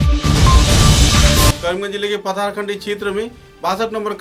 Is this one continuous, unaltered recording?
yes; 0 cuts

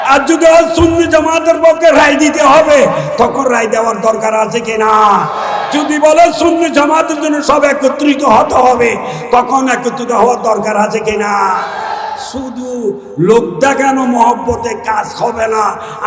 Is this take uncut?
yes; 0 cuts

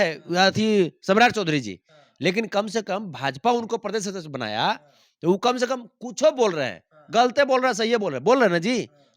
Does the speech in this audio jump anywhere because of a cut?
no; 0 cuts

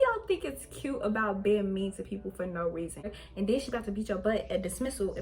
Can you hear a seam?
yes; 1 cut; at 3.1 s

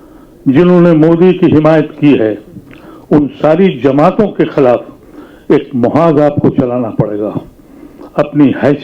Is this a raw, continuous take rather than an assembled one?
yes; 0 cuts

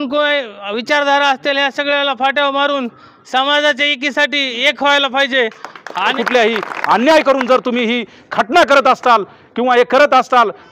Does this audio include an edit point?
yes; 1 cut; at 6.1 s

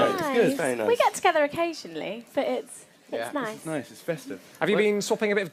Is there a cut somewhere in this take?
yes; 1 cut; at 2.0 s

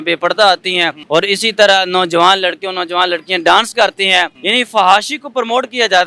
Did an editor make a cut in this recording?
yes; 2 cuts; at 1.0 s, 4.4 s

